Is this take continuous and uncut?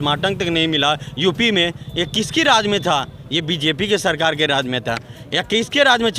yes; 0 cuts

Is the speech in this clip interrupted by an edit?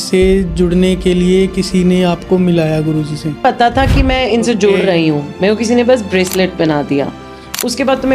yes; 1 cut; at 3.4 s

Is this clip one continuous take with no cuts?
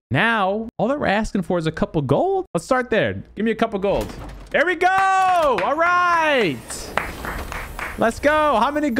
yes; 0 cuts

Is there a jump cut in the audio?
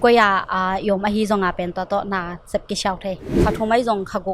yes; 1 cut; at 3.3 s

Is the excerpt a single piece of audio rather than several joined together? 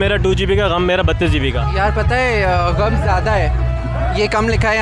yes; 0 cuts

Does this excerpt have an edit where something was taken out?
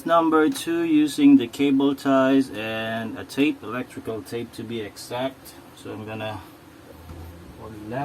yes; 1 cut; at 6.9 s

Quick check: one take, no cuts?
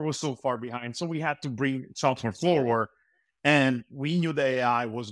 yes; 0 cuts

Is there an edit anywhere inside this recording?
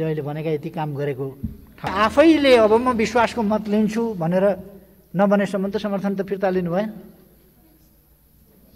yes; 1 cut; at 1.9 s

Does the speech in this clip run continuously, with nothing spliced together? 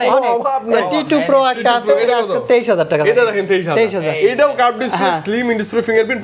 yes; 0 cuts

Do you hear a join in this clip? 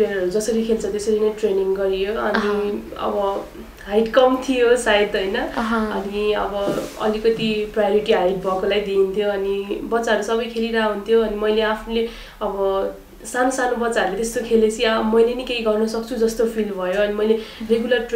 no; 0 cuts

